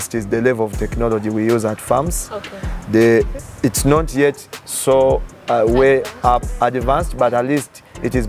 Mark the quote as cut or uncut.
uncut